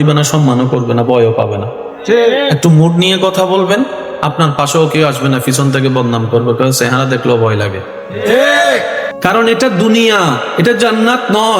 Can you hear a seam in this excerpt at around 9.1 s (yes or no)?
yes